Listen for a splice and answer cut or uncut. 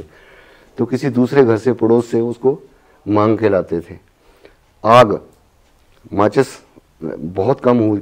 uncut